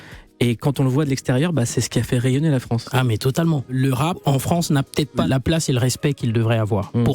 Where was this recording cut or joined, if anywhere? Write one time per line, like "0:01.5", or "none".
0:03.9
0:05.2